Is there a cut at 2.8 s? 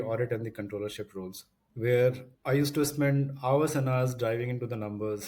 no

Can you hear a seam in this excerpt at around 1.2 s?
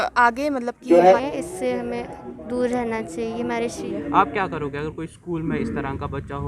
yes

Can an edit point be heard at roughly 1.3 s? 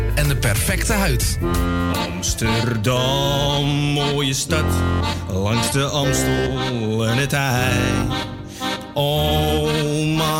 yes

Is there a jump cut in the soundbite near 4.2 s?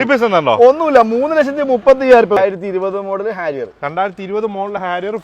no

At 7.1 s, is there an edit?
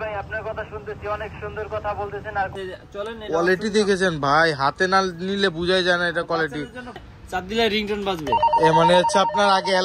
yes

